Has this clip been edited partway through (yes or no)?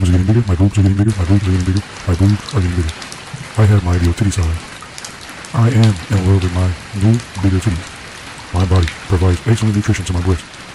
no